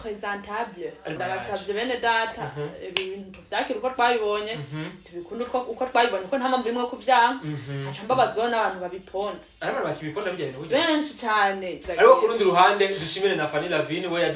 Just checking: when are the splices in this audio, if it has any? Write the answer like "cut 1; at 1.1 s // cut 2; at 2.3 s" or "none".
cut 1; at 1.1 s // cut 2; at 11.8 s

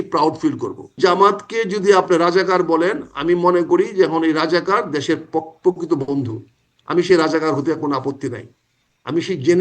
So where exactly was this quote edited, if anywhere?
cut 1; at 1.0 s

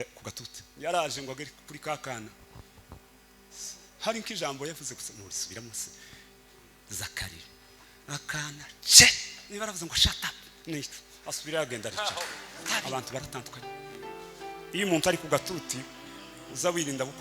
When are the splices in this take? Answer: cut 1; at 12.7 s

